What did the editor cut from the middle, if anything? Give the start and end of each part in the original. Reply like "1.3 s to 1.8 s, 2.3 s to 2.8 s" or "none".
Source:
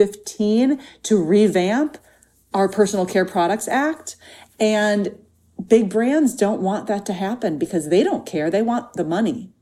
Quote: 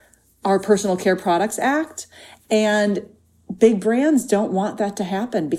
none